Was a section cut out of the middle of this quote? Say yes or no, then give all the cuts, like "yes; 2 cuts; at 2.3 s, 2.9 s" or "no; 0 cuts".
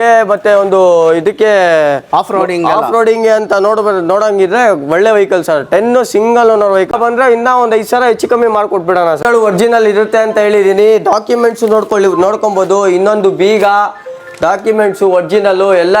yes; 2 cuts; at 6.9 s, 9.2 s